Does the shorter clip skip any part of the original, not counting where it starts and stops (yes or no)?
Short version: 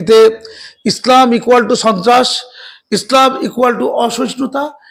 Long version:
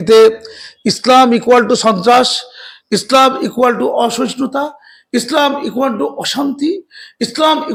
no